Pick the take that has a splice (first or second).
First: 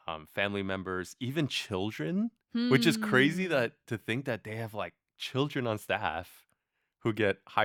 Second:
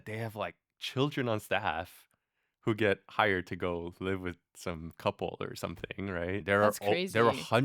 second